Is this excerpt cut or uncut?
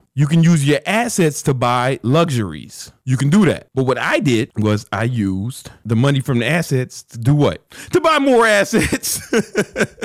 cut